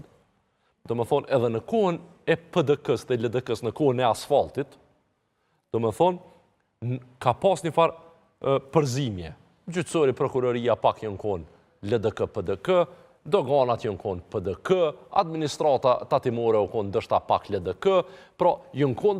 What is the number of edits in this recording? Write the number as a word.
zero